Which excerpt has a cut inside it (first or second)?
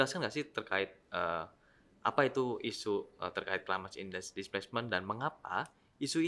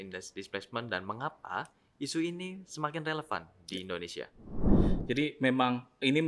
second